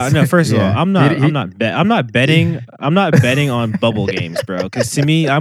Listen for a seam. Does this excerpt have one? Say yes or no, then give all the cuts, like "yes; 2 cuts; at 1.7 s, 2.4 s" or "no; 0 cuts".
no; 0 cuts